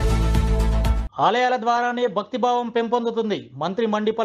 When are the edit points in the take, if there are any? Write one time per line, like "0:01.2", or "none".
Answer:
0:01.0